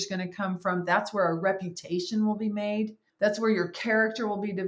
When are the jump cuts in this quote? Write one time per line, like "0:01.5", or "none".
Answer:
0:03.1